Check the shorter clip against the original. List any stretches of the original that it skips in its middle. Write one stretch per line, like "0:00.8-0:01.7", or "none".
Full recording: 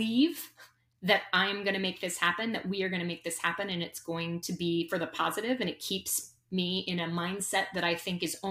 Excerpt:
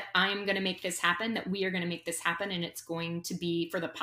none